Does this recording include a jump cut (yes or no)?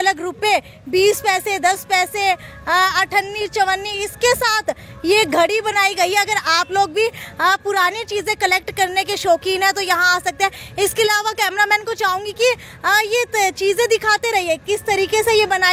no